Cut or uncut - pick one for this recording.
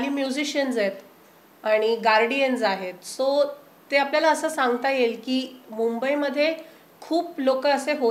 uncut